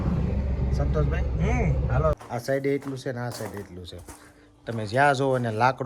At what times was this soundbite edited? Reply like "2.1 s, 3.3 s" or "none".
2.2 s